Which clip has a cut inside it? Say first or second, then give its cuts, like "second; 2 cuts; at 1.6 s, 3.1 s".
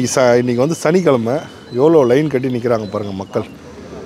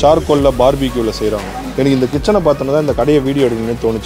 second; 1 cut; at 1.6 s